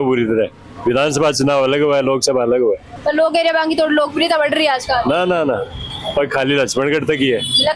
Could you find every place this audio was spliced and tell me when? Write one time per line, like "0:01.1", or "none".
none